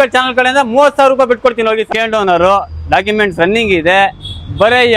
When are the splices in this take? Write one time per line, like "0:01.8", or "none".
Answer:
0:01.9